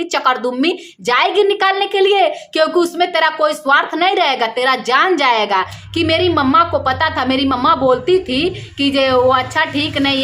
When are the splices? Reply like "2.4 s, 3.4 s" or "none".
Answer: 5.8 s